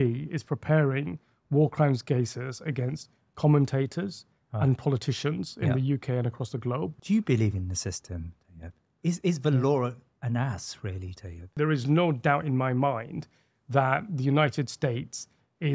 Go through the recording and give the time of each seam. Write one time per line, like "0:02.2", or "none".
0:07.0
0:11.5

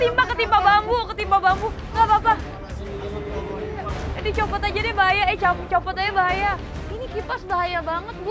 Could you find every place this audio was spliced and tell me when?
none

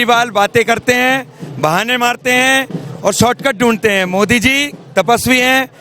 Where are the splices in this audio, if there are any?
none

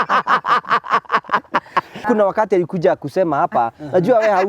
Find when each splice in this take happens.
0:02.1

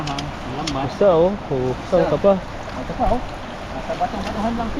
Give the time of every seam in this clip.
none

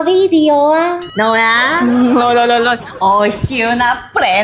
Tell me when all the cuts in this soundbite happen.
0:02.9

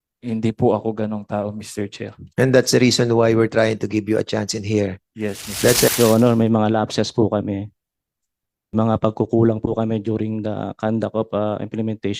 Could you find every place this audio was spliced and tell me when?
0:05.9
0:08.7

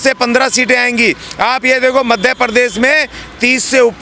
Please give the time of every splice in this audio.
none

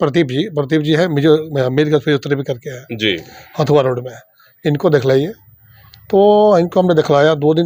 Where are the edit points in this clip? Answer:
none

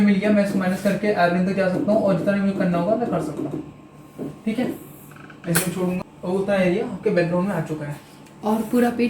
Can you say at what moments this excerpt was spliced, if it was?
0:06.0

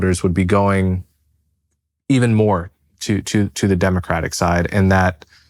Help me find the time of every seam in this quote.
none

